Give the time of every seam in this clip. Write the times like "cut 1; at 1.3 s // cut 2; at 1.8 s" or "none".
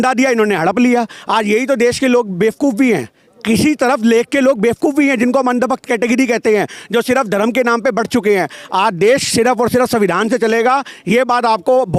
none

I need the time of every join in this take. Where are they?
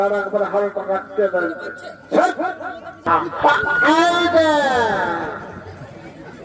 cut 1; at 2.9 s

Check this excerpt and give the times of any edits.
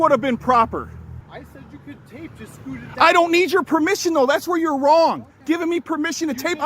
cut 1; at 1.2 s

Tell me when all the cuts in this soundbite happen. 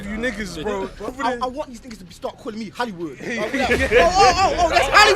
cut 1; at 1.1 s

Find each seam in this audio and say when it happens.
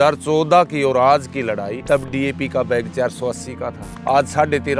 cut 1; at 1.7 s // cut 2; at 3.9 s

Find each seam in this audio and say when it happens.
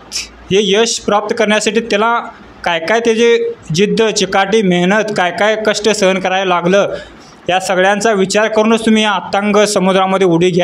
none

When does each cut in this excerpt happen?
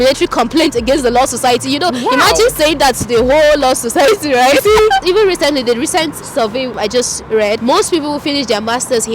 cut 1; at 5.0 s

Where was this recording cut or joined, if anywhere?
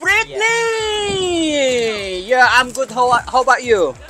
none

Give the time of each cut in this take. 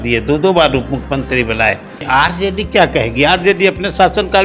cut 1; at 2.0 s

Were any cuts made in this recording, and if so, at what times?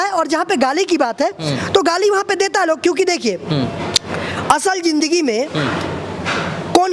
none

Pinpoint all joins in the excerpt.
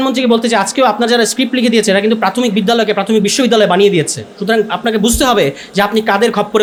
none

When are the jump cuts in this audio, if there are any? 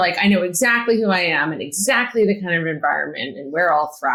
none

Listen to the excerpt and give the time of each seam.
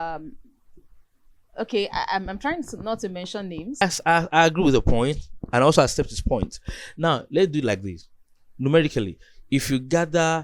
cut 1; at 3.8 s

